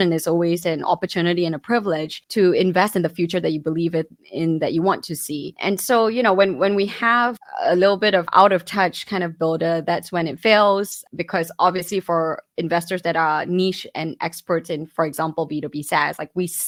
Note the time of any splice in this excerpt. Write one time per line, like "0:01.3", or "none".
none